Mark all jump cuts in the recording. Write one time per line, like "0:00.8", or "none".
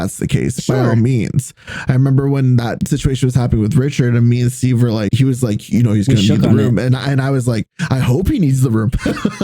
0:02.8
0:05.1